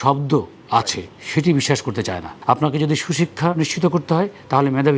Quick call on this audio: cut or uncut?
cut